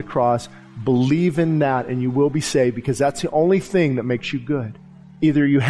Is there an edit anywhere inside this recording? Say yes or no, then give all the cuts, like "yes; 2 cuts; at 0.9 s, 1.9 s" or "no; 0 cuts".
no; 0 cuts